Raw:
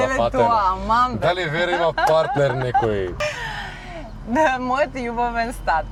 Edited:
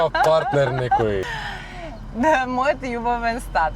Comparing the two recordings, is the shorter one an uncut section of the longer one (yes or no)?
no